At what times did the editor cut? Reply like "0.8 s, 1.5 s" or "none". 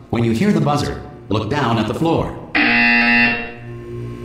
none